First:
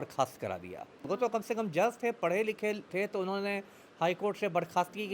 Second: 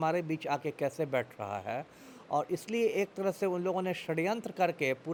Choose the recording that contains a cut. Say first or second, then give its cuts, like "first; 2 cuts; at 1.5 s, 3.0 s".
first; 1 cut; at 1.1 s